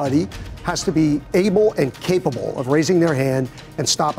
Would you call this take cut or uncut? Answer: uncut